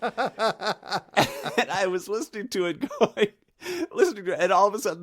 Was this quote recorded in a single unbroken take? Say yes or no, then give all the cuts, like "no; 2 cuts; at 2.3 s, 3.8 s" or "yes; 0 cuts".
no; 1 cut; at 1.1 s